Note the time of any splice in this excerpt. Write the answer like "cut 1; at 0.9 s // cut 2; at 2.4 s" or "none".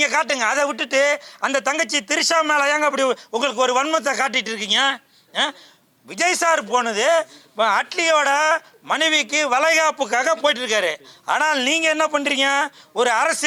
none